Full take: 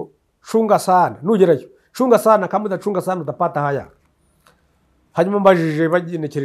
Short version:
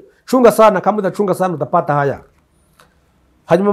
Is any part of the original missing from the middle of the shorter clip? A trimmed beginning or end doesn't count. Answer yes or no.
no